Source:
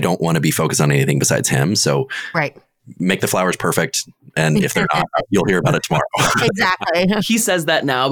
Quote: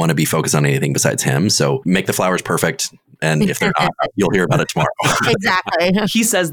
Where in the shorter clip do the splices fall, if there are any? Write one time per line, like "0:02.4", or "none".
0:01.8